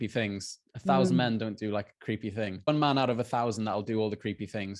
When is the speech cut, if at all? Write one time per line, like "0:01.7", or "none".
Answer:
0:02.7